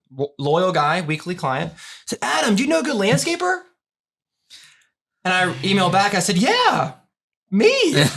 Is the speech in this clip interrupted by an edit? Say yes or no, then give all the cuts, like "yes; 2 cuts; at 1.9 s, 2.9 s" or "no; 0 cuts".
no; 0 cuts